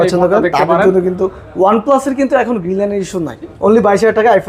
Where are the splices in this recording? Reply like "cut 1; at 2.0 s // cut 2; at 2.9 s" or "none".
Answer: cut 1; at 3.5 s